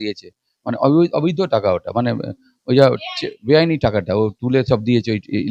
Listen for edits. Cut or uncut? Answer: uncut